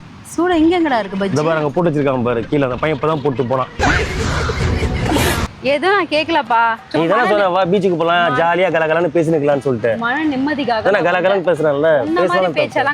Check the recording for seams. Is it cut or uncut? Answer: cut